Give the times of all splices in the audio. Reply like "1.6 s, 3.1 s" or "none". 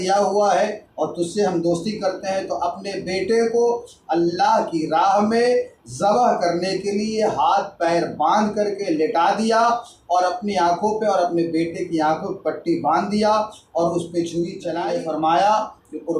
14.7 s